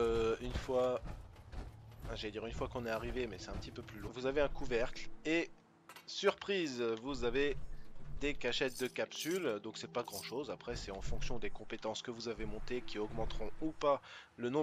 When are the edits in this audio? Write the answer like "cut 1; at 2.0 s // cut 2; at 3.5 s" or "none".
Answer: none